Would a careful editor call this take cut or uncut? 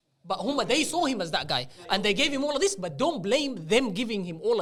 uncut